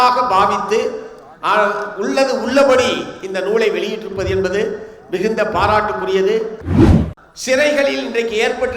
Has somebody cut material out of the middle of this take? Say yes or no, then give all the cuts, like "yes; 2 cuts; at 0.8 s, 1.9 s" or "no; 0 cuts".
yes; 1 cut; at 6.8 s